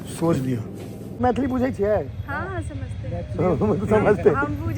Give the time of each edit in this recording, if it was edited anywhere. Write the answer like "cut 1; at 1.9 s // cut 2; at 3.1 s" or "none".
cut 1; at 1.2 s